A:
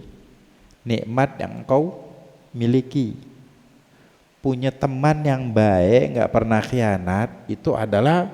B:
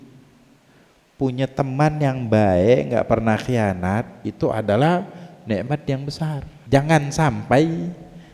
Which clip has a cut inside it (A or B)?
B